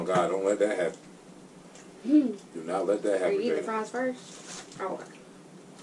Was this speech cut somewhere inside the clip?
no; 0 cuts

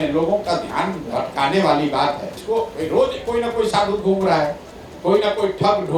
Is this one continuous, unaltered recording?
no; 1 cut; at 2.4 s

